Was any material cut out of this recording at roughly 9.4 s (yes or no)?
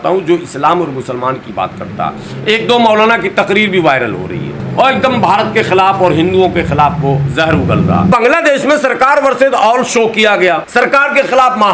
no